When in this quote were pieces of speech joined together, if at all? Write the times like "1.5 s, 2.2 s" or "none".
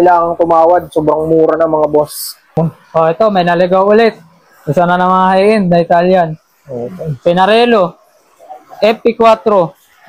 2.5 s